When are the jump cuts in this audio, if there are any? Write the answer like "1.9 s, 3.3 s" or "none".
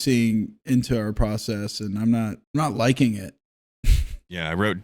2.4 s